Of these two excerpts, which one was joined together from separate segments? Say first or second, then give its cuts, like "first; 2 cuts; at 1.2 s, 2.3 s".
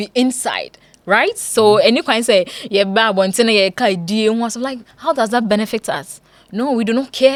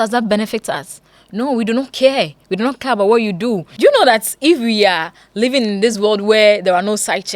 second; 1 cut; at 3.7 s